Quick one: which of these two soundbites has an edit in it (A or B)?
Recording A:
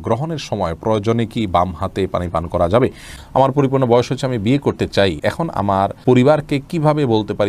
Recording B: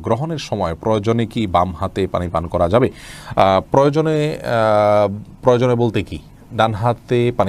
A